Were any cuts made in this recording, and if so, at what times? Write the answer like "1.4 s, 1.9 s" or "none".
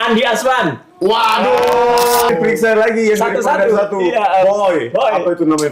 2.3 s